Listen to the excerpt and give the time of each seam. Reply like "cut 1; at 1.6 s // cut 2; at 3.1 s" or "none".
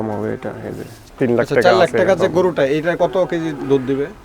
cut 1; at 3.0 s